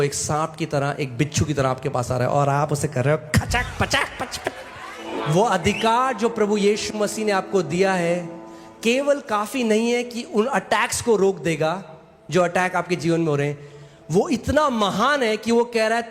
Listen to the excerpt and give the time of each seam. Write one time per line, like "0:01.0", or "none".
0:05.0